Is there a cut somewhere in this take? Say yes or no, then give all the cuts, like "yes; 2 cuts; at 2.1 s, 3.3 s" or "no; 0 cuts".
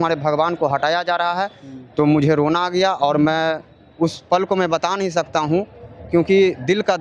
no; 0 cuts